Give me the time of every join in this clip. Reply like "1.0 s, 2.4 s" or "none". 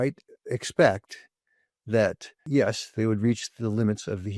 2.3 s